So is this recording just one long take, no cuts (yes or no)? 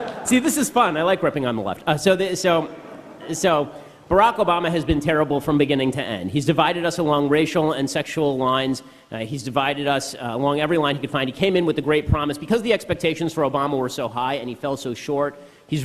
no